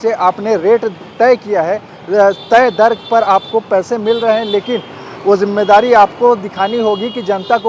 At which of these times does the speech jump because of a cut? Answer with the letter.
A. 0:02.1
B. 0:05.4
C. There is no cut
C